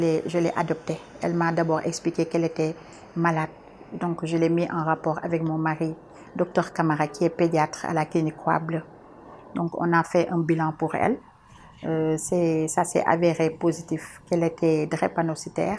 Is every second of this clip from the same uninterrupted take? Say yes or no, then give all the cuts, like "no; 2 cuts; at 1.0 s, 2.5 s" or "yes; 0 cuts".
yes; 0 cuts